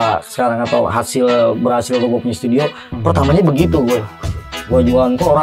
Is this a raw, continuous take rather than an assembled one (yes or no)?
yes